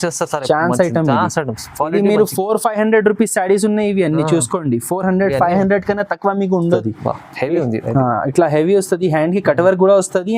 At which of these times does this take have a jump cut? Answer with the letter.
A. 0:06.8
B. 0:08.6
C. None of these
A